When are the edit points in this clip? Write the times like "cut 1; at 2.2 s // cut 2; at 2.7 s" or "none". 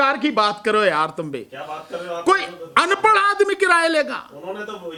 none